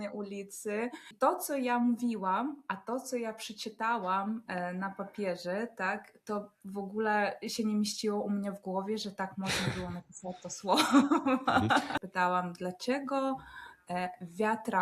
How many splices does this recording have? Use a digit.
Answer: 2